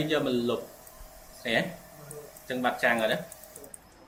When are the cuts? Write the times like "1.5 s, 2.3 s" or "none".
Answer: none